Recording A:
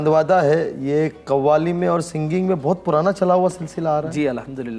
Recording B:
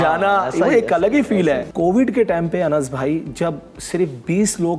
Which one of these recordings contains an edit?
B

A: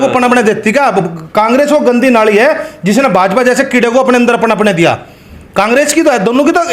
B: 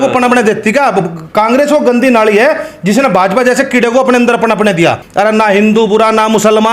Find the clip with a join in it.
B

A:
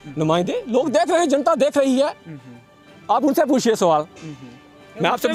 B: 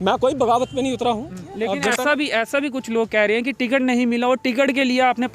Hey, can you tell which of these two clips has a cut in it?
B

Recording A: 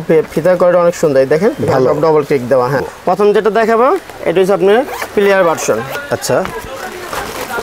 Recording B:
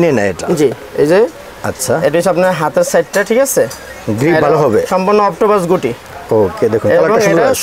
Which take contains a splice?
A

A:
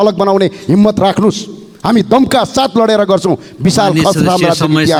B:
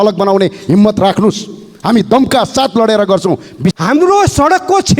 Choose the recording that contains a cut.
B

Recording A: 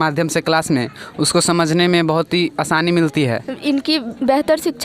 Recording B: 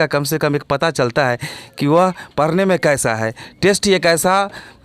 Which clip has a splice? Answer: A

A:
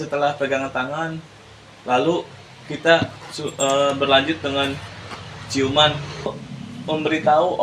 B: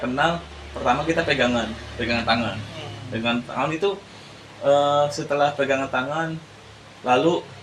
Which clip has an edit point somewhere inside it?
A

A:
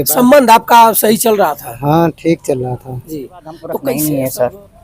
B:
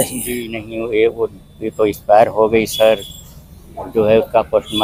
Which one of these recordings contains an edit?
A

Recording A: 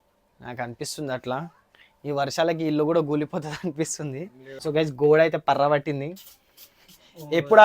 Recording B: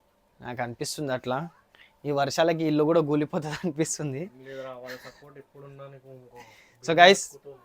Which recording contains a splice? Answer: A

